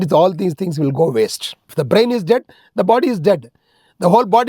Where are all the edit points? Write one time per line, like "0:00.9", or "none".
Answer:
0:01.6